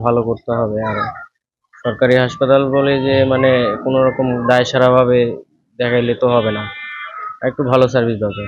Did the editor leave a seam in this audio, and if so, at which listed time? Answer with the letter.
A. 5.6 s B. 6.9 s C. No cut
C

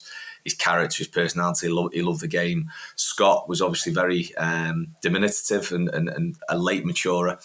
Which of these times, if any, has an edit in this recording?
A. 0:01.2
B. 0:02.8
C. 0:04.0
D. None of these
D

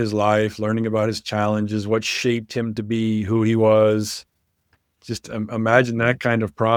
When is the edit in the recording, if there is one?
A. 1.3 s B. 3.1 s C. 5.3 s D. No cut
D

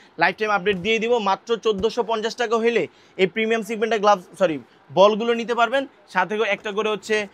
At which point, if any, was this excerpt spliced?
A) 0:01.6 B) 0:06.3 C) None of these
C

